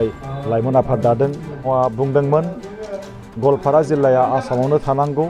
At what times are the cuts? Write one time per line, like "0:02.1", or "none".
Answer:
0:01.6